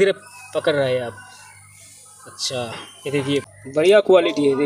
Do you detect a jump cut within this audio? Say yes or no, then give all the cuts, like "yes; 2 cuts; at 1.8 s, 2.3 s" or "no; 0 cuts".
yes; 1 cut; at 3.5 s